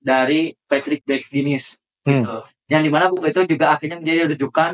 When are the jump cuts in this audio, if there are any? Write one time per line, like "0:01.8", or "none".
0:01.0